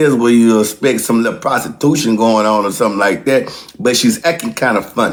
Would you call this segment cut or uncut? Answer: uncut